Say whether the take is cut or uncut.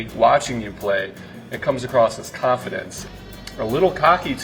cut